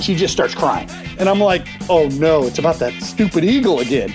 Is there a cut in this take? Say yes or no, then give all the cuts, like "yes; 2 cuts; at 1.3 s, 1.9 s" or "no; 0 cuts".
yes; 2 cuts; at 1.1 s, 2.6 s